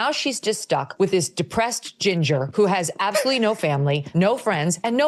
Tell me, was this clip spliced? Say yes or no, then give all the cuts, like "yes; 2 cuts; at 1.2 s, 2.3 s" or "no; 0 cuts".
no; 0 cuts